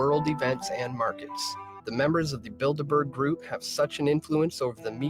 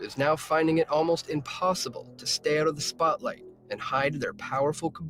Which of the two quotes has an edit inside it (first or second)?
first